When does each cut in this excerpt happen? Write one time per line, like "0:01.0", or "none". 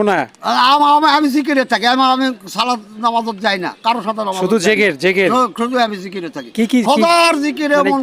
none

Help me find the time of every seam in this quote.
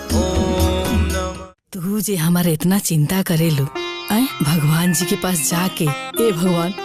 0:01.3

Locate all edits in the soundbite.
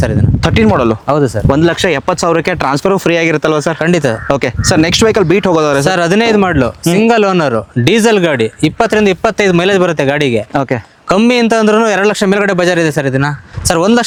none

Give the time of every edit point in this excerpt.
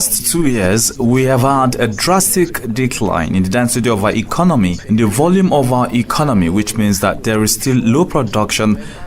0:04.8

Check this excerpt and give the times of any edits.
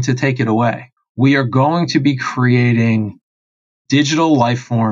0:00.9
0:03.7

